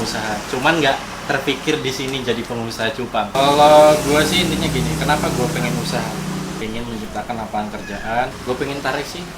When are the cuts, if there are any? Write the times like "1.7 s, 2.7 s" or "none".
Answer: 3.3 s, 6.6 s, 8.4 s